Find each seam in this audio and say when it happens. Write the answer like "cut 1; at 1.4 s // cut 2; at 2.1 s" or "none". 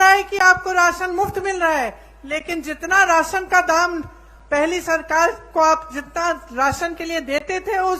none